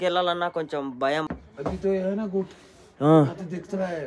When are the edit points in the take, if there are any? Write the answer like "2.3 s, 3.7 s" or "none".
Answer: 1.3 s